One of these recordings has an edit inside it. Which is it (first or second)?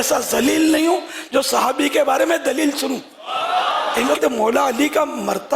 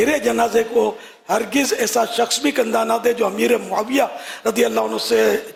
first